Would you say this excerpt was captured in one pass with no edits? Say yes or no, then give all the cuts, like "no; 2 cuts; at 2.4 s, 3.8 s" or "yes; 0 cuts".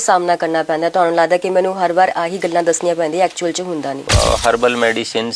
no; 1 cut; at 4.0 s